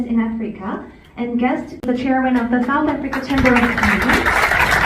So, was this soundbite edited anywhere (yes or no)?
yes